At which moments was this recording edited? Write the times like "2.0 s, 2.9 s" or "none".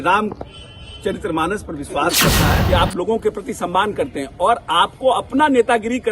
2.6 s